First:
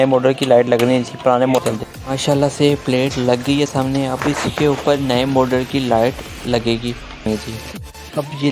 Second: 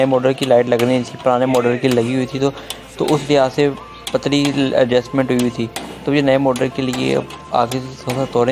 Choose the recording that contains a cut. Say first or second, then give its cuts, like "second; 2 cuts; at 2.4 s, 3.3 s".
first; 2 cuts; at 1.6 s, 7.3 s